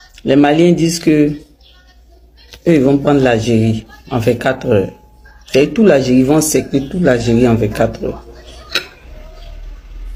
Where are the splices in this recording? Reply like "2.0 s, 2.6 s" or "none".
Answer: none